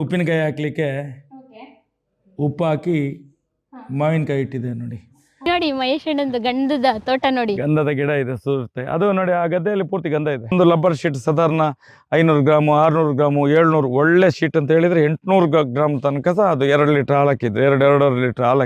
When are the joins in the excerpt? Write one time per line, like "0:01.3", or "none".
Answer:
0:05.5
0:10.5